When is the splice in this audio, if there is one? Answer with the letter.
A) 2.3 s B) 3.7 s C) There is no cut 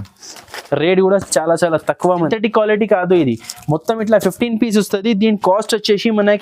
A